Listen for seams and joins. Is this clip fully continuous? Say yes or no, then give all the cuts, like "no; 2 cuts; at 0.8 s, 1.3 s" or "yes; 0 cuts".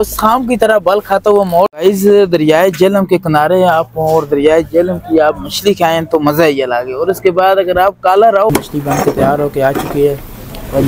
no; 2 cuts; at 1.7 s, 8.5 s